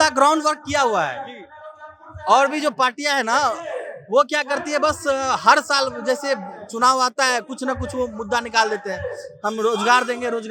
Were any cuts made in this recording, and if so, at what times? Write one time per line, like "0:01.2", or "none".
none